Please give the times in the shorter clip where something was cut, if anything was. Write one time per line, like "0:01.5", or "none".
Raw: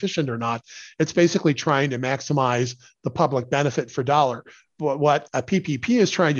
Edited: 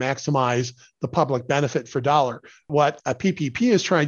0:02.7